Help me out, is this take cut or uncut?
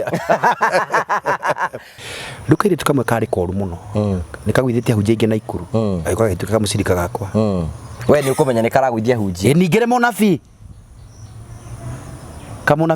cut